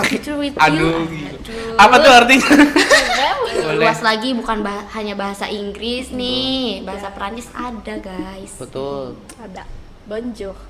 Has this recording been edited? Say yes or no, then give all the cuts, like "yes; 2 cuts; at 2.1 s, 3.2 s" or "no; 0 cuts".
yes; 1 cut; at 3.6 s